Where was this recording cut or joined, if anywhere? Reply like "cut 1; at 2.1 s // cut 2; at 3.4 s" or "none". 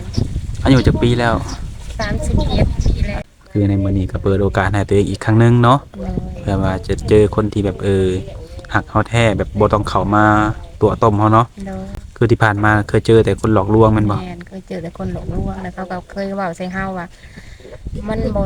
cut 1; at 3.2 s